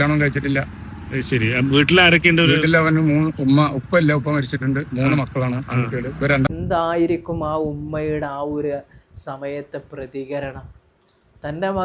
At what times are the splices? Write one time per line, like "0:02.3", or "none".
0:06.5